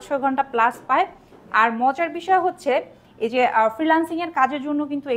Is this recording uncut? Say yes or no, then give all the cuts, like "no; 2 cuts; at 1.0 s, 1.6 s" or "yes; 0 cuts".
yes; 0 cuts